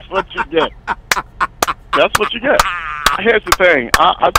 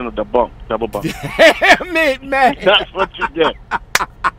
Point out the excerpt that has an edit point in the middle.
first; 1 cut; at 2.8 s

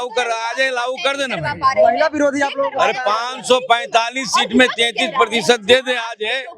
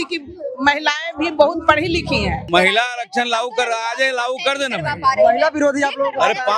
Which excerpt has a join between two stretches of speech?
second; 1 cut; at 2.4 s

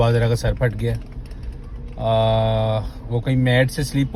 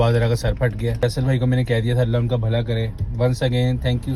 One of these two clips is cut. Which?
second; 1 cut; at 1.0 s

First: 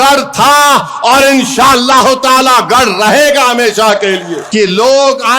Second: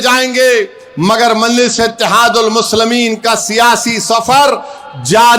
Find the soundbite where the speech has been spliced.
first; 1 cut; at 4.4 s

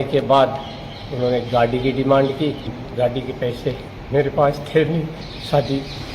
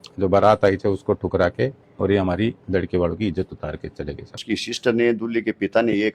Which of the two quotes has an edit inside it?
second; 1 cut; at 4.4 s

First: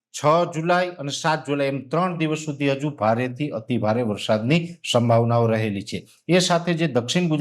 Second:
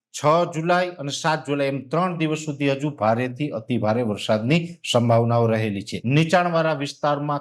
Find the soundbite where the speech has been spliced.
second; 1 cut; at 5.9 s

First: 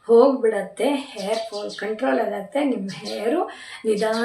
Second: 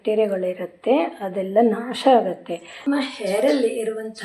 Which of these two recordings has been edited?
second; 1 cut; at 2.9 s

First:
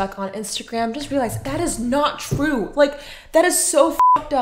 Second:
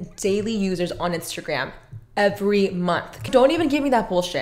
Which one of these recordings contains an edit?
second; 1 cut; at 3.3 s

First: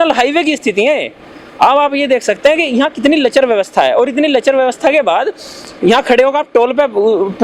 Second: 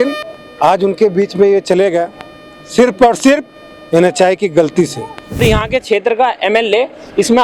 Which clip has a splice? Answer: second; 1 cut; at 5.4 s

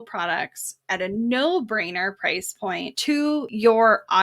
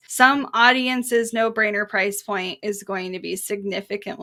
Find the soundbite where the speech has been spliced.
first; 1 cut; at 3.3 s

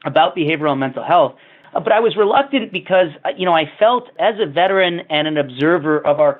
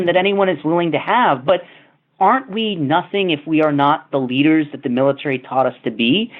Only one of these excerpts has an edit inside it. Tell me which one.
first; 2 cuts; at 1.5 s, 4.1 s

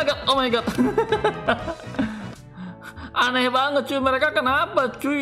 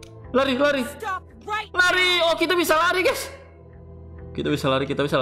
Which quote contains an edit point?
first; 1 cut; at 2.3 s

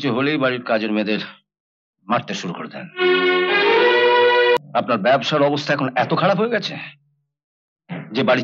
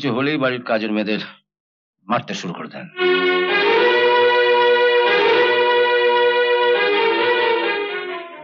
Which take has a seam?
first; 1 cut; at 4.6 s

